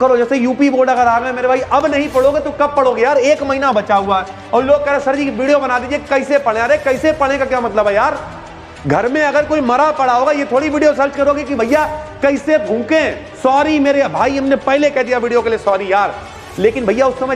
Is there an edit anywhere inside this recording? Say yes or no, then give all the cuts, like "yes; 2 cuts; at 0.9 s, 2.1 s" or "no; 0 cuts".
no; 0 cuts